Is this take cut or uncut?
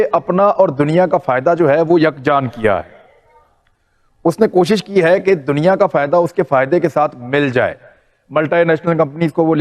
uncut